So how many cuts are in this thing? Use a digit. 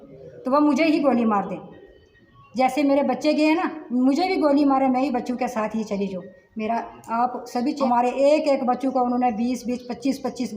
1